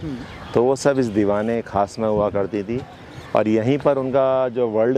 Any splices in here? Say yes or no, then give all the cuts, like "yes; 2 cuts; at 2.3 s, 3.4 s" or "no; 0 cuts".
no; 0 cuts